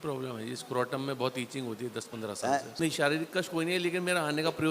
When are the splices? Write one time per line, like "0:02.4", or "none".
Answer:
0:02.7